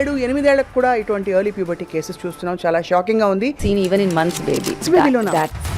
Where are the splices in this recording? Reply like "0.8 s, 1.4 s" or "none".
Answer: 3.6 s, 4.8 s